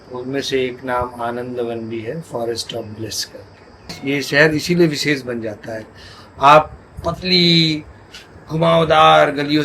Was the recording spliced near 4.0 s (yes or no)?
yes